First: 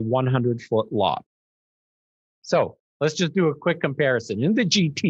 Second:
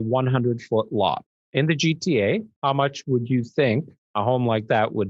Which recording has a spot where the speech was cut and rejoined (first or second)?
second